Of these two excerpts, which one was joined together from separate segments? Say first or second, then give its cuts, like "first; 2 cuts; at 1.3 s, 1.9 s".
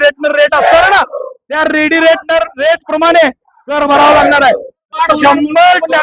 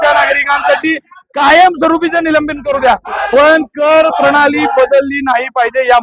first; 1 cut; at 5.0 s